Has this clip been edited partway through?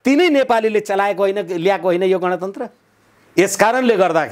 no; 0 cuts

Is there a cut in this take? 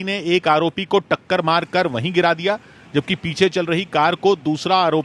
no; 0 cuts

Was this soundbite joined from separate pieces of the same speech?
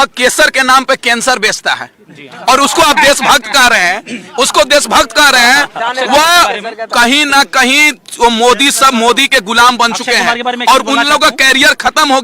no; 0 cuts

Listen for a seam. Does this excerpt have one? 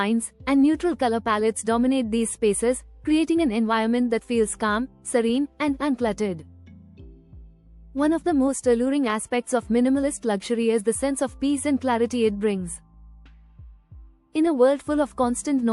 no; 0 cuts

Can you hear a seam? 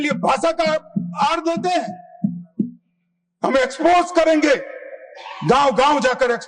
no; 0 cuts

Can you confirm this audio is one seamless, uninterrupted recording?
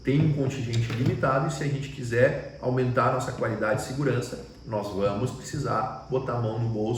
yes; 0 cuts

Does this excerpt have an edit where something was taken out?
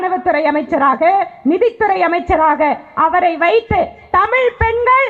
no; 0 cuts

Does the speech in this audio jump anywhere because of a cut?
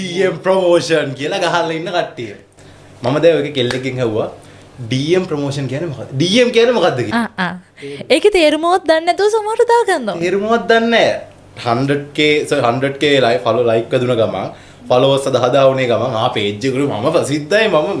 no; 0 cuts

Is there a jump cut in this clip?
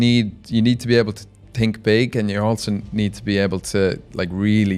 no; 0 cuts

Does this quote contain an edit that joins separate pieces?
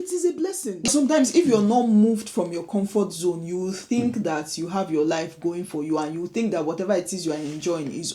yes; 1 cut; at 0.9 s

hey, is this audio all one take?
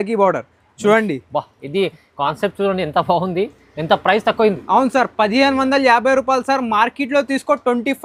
yes; 0 cuts

